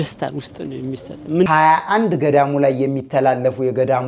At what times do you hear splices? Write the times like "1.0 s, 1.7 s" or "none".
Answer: 1.5 s